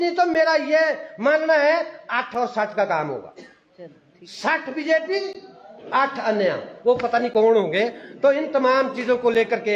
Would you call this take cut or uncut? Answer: uncut